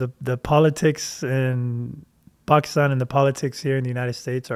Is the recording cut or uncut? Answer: uncut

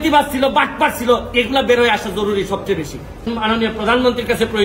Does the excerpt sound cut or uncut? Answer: cut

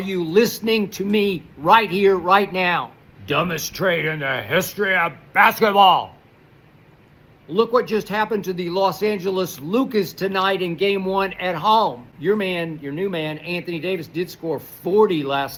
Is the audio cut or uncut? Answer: uncut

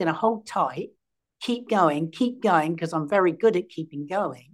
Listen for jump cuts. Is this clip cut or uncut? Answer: uncut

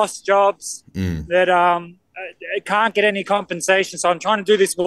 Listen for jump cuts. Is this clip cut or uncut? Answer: uncut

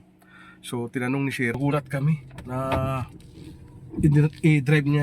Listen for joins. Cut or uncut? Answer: cut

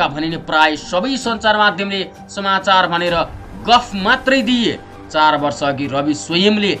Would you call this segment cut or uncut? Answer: uncut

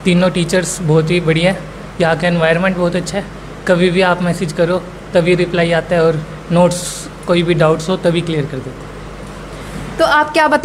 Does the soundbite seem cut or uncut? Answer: uncut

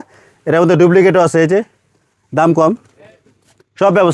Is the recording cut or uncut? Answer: uncut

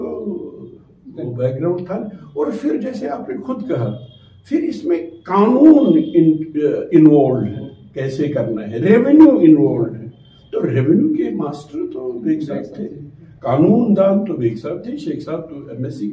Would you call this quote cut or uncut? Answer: uncut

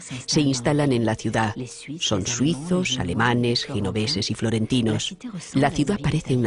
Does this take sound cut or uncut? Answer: uncut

